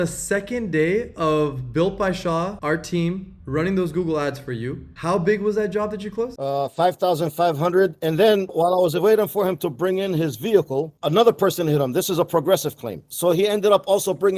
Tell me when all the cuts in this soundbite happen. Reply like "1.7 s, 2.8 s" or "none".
none